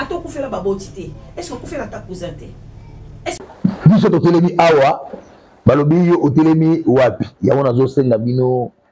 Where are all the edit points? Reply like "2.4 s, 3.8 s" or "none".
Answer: 3.4 s